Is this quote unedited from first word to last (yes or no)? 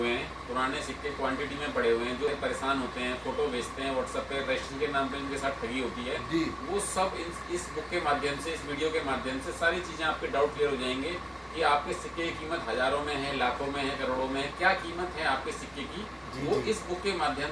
no